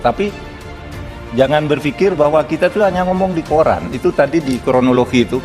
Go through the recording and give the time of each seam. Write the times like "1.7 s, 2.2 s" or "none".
2.1 s